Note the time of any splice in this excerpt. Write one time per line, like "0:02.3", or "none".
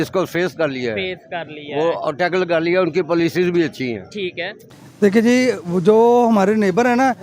0:05.2